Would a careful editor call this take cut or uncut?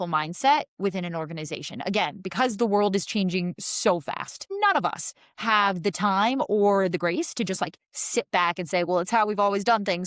uncut